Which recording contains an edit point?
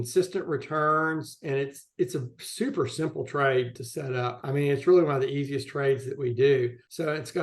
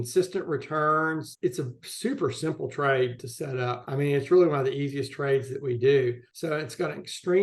second; 1 cut; at 1.3 s

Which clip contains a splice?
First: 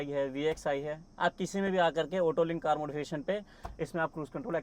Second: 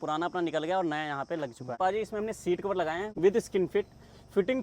second; 2 cuts; at 1.8 s, 3.1 s

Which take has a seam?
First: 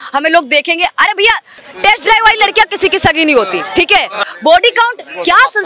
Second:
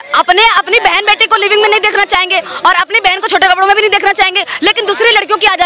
first; 2 cuts; at 1.7 s, 4.2 s

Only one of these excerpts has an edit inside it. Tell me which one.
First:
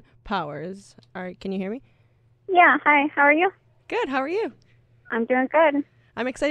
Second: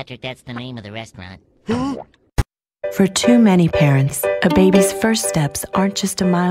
second; 1 cut; at 2.4 s

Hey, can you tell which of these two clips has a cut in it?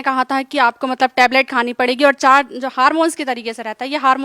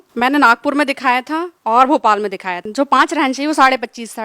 second; 2 cuts; at 1.5 s, 2.6 s

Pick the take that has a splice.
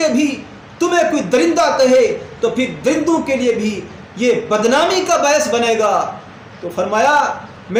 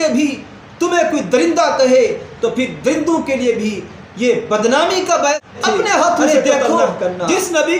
second; 1 cut; at 5.4 s

